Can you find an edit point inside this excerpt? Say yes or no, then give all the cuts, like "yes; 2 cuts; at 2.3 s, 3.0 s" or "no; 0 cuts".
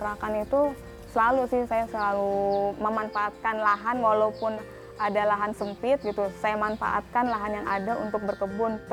no; 0 cuts